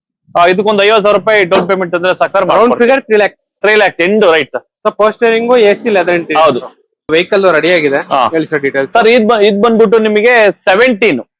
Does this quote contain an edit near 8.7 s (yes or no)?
no